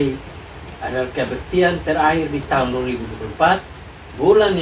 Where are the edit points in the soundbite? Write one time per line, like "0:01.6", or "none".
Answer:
none